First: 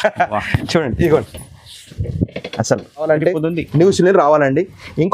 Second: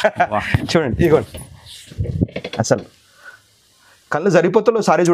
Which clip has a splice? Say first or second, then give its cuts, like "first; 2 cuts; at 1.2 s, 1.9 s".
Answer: first; 1 cut; at 3.1 s